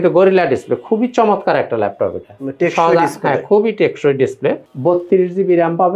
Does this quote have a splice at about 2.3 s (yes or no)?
no